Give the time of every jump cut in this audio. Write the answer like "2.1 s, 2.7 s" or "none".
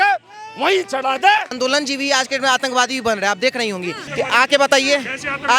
1.5 s, 4.0 s